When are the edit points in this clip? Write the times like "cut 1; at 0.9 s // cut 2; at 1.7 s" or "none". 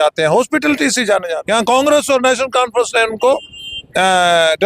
cut 1; at 1.3 s